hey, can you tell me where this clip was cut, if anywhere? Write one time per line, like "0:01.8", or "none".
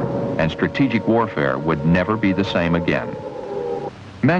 0:02.0